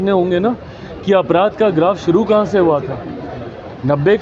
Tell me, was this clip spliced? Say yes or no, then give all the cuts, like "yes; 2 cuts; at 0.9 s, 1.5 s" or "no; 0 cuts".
no; 0 cuts